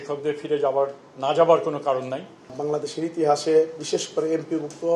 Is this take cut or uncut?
cut